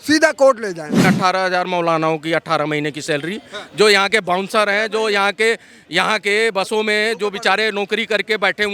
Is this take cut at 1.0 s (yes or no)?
yes